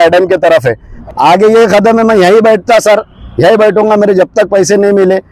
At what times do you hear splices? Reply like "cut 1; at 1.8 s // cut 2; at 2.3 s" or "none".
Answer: cut 1; at 0.9 s